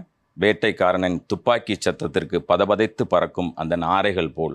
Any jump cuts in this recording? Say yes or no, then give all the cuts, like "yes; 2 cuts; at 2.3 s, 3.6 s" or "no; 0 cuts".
no; 0 cuts